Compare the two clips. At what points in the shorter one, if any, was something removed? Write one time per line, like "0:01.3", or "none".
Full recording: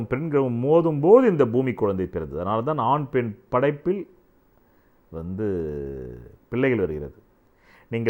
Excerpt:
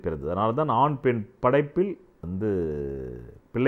0:02.1